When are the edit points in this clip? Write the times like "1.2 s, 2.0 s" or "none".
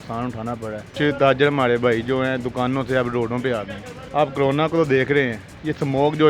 0.9 s, 3.9 s